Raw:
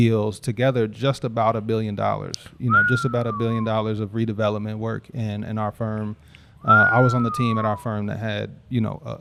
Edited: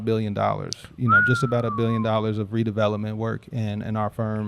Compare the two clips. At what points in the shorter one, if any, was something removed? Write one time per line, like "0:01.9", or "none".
none